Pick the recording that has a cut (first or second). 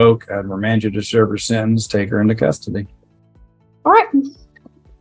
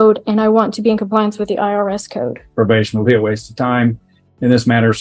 second